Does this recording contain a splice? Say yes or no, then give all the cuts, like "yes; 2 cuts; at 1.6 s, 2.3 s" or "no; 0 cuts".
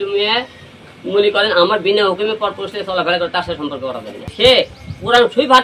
yes; 1 cut; at 4.3 s